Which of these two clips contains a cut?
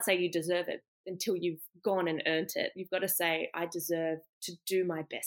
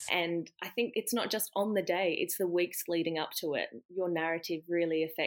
second; 1 cut; at 0.9 s

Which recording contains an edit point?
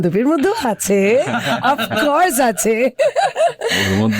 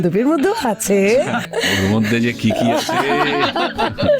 second; 1 cut; at 1.5 s

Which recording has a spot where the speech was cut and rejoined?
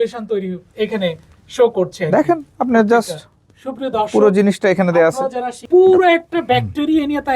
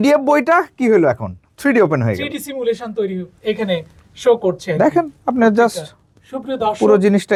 first; 1 cut; at 5.6 s

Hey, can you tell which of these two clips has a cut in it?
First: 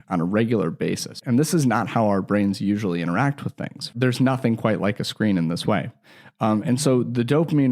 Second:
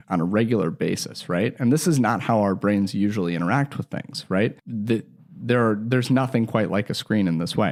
first; 2 cuts; at 1.2 s, 3.9 s

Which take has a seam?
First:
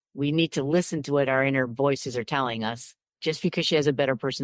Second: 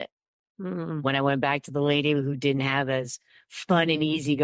first; 1 cut; at 3.1 s

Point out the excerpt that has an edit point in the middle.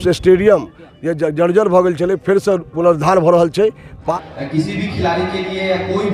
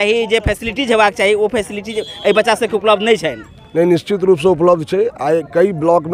first; 1 cut; at 4.0 s

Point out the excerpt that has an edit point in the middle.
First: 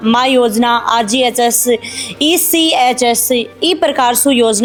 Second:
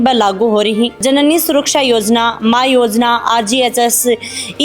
second; 1 cut; at 1.0 s

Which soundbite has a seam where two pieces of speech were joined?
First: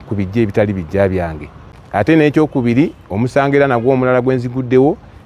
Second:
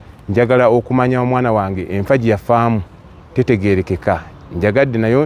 first; 1 cut; at 1.8 s

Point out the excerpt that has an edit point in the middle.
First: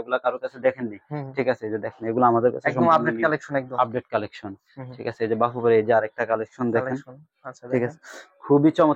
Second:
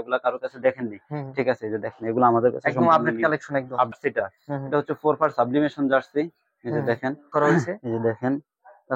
second; 2 cuts; at 3.9 s, 7.2 s

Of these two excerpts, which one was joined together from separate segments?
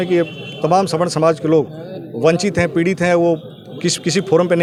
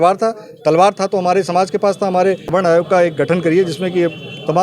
second; 1 cut; at 2.4 s

